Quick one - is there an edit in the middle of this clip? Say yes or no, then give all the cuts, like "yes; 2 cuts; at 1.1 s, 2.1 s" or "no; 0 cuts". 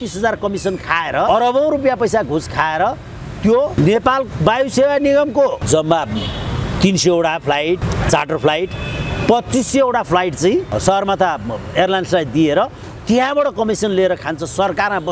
yes; 5 cuts; at 1.3 s, 3.8 s, 5.6 s, 7.8 s, 10.8 s